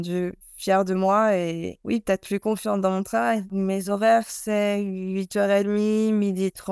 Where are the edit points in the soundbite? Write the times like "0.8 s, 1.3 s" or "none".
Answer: 3.5 s